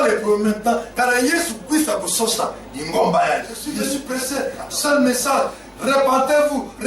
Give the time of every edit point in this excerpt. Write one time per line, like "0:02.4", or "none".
0:03.8